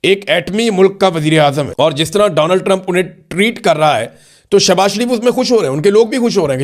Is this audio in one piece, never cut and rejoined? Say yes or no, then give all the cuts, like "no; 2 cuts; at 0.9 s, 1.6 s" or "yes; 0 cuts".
no; 1 cut; at 1.7 s